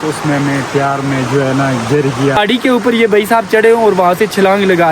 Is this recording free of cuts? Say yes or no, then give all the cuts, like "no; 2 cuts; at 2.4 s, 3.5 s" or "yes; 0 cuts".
no; 1 cut; at 2.3 s